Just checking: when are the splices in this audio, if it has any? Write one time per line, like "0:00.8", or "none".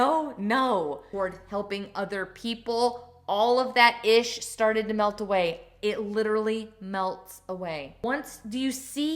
0:01.1
0:08.0